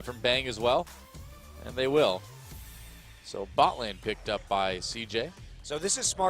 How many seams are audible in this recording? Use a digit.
1